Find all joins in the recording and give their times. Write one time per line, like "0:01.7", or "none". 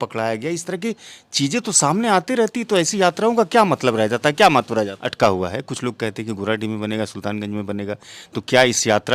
0:05.1